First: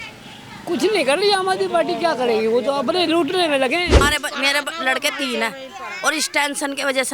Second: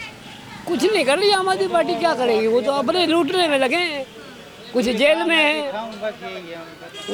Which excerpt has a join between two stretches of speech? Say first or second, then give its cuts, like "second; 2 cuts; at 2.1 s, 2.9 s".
first; 1 cut; at 4.0 s